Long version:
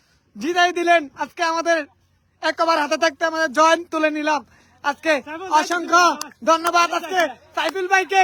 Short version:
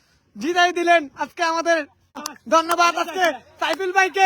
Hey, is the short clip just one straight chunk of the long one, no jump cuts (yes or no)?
no